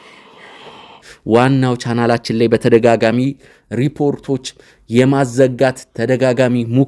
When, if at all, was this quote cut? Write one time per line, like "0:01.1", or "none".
0:01.1